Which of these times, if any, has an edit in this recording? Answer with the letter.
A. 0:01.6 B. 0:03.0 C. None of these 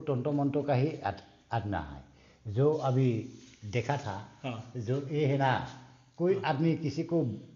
C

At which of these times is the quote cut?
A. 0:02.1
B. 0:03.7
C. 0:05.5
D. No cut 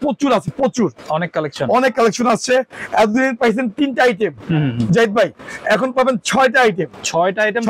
D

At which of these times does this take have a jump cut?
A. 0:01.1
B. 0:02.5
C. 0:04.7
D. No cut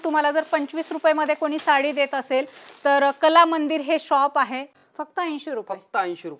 C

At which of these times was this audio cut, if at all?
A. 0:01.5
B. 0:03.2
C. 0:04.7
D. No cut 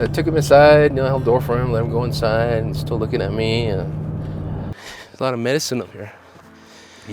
C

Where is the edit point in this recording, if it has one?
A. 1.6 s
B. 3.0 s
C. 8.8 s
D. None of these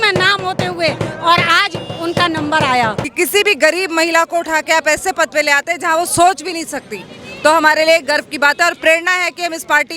B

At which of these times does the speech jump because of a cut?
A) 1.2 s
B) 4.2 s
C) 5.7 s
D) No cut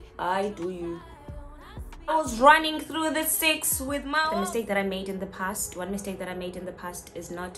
B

